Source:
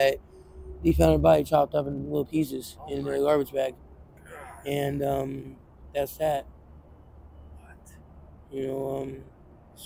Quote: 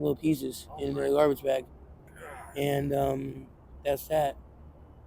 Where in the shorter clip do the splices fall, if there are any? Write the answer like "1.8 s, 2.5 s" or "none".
none